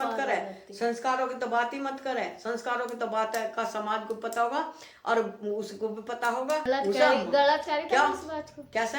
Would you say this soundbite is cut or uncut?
cut